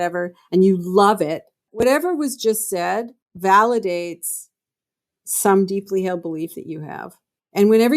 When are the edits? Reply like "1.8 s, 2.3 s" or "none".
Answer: 1.8 s, 3.2 s